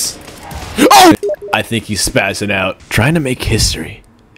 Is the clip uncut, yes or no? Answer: no